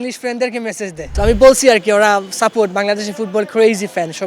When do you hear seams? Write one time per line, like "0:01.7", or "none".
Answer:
0:01.0